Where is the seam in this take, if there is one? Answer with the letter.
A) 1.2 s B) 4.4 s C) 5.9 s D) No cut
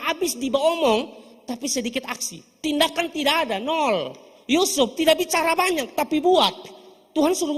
D